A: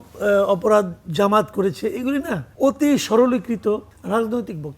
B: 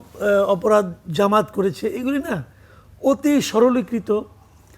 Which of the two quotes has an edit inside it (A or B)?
A